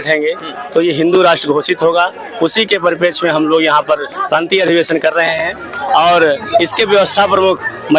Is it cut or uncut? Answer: uncut